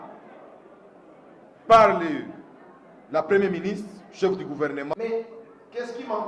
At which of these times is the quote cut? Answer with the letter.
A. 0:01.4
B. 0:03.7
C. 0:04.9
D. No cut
C